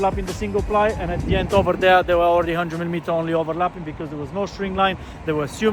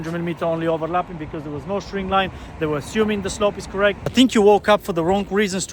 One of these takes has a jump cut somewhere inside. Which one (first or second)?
second